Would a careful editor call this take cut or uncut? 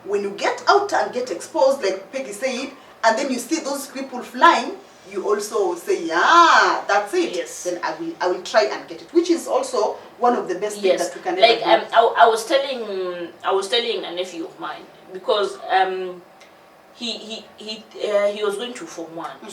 uncut